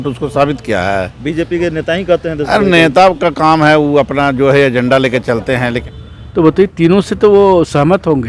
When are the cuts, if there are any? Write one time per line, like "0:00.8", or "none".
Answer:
0:05.9